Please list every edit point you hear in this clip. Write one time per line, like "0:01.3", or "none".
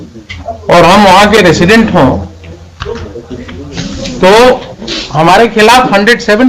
none